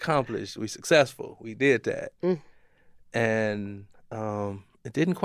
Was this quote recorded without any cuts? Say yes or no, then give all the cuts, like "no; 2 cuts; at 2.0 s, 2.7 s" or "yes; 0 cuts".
yes; 0 cuts